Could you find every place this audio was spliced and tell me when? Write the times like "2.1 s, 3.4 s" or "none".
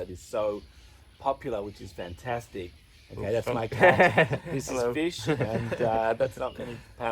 2.8 s

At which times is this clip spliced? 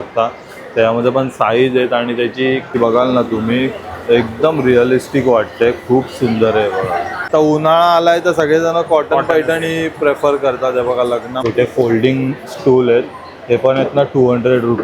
2.8 s, 7.2 s, 11.4 s

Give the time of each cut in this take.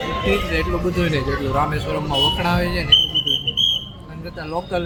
none

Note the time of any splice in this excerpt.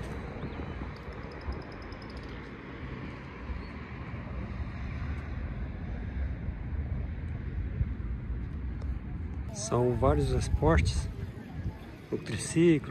9.5 s

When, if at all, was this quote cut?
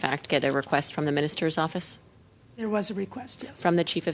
none

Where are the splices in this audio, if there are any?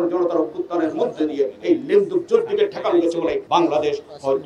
3.4 s

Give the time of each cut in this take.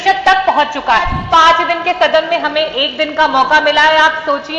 1.2 s

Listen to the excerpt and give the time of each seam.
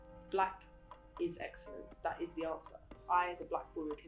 3.0 s

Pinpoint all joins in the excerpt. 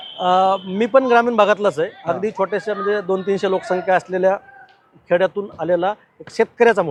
none

